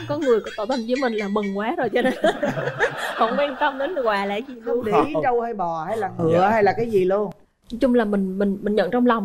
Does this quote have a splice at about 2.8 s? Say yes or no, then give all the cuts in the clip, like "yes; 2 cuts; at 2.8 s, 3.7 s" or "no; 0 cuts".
no; 0 cuts